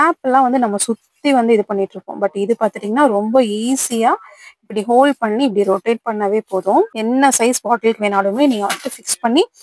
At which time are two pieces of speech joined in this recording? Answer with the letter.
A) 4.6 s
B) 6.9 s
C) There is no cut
B